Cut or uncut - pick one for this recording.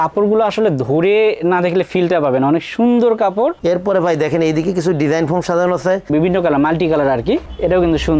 cut